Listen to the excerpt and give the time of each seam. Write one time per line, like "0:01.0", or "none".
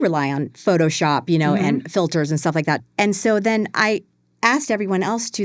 0:02.8

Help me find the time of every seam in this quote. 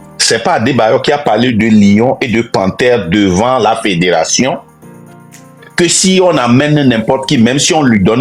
none

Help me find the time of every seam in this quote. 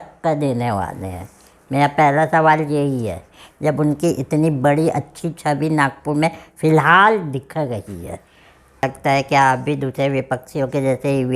0:08.9

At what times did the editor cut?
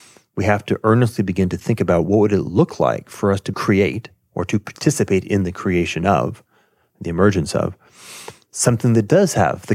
0:03.6

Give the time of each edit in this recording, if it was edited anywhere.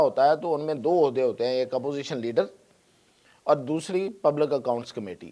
none

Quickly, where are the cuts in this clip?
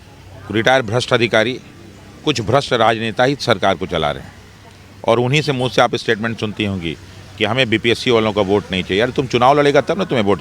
none

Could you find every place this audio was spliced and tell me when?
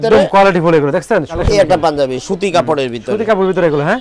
0:01.3

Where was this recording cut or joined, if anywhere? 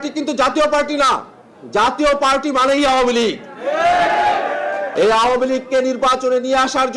0:04.9

